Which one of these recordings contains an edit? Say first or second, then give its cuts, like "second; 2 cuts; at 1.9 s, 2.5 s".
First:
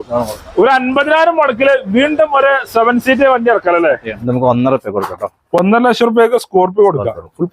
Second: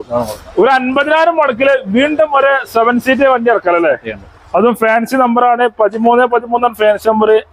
first; 1 cut; at 4.2 s